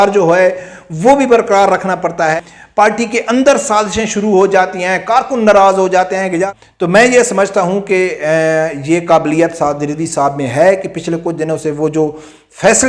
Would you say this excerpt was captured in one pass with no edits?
no; 2 cuts; at 2.4 s, 6.6 s

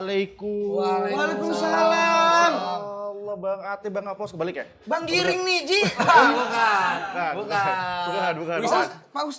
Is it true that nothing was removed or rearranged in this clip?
yes; 0 cuts

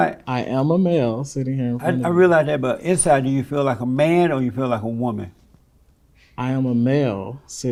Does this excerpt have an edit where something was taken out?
no; 0 cuts

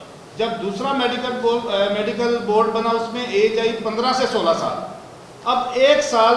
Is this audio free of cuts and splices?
yes; 0 cuts

